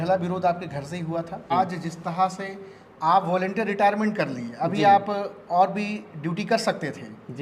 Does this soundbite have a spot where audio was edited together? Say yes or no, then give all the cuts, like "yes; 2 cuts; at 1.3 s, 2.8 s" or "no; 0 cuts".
yes; 1 cut; at 1.5 s